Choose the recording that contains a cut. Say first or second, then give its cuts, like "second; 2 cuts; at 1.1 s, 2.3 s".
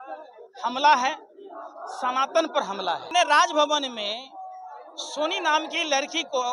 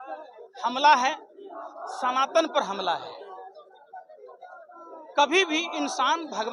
first; 1 cut; at 3.1 s